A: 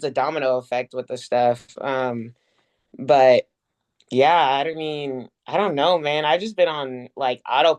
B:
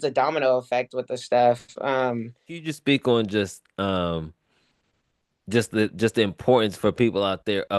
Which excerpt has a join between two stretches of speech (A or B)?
B